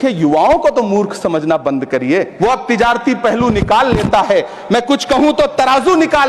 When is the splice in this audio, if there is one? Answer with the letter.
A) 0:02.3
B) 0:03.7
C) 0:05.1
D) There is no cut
A